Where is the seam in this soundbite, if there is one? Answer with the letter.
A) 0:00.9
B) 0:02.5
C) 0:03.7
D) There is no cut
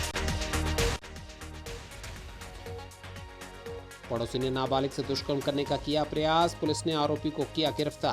A